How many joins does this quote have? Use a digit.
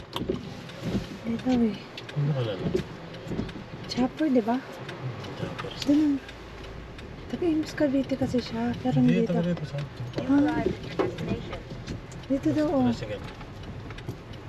0